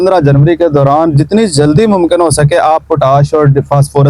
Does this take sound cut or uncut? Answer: uncut